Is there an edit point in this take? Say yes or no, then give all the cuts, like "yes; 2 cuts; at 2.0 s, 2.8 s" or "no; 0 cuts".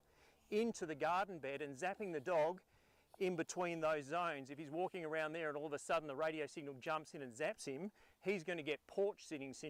no; 0 cuts